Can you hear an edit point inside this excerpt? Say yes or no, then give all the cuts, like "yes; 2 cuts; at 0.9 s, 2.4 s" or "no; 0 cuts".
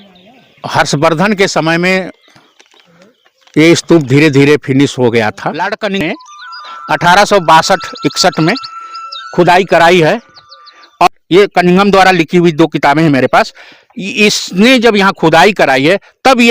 yes; 2 cuts; at 5.6 s, 11.1 s